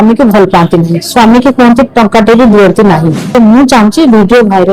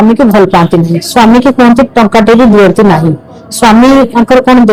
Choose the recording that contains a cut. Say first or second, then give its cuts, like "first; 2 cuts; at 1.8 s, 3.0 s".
first; 1 cut; at 3.3 s